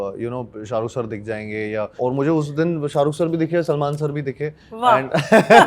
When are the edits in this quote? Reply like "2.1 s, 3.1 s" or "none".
2.0 s